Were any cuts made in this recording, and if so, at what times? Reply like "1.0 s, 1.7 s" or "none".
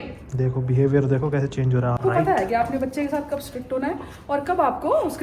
2.0 s

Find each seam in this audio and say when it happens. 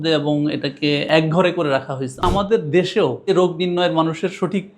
1.1 s, 2.2 s, 3.3 s

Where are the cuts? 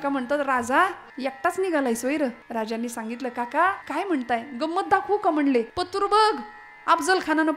1.1 s, 2.4 s, 3.8 s, 5.8 s

